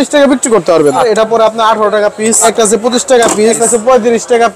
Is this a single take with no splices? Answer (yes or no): no